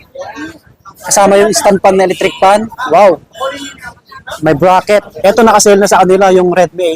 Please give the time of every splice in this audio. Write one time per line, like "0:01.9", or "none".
0:05.1